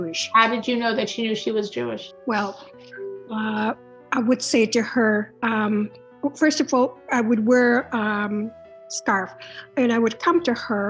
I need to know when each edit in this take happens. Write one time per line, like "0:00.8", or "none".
0:02.1
0:05.3